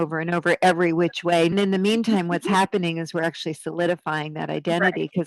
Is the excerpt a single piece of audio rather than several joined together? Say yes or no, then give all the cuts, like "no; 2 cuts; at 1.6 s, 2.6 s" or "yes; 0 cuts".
no; 1 cut; at 1.5 s